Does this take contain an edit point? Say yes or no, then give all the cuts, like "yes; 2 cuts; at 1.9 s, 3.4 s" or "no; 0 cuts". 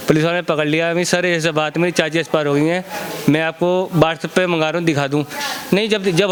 no; 0 cuts